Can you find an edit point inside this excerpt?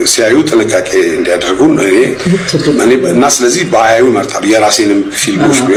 no; 0 cuts

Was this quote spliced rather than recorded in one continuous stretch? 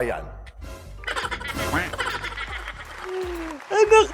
no; 0 cuts

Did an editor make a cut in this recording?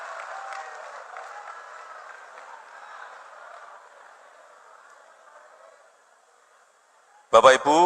no; 0 cuts

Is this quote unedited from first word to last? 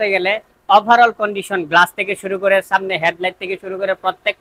yes; 0 cuts

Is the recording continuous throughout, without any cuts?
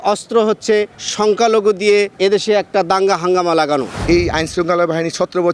no; 3 cuts; at 1.0 s, 2.1 s, 3.9 s

